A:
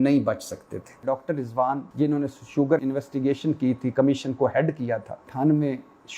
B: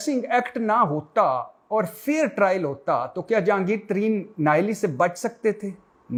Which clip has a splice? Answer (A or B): A